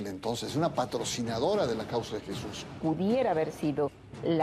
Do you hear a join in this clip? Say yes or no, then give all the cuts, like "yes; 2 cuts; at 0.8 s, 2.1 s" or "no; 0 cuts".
yes; 1 cut; at 2.6 s